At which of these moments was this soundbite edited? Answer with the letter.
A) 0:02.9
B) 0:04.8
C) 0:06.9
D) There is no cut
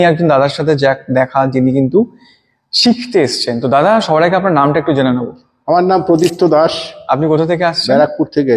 D